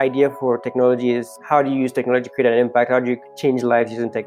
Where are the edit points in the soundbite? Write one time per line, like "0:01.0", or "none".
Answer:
0:01.3
0:03.3